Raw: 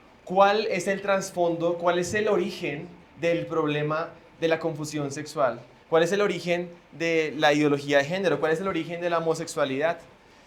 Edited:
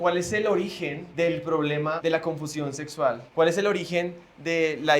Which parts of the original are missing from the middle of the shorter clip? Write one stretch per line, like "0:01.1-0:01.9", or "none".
0:02.8-0:03.1
0:04.0-0:04.4
0:05.6-0:05.8